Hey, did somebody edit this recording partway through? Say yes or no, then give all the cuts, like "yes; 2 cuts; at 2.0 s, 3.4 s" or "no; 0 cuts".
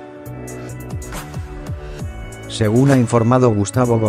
yes; 1 cut; at 2.0 s